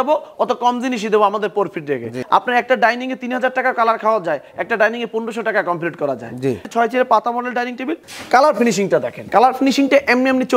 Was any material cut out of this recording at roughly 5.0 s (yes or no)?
no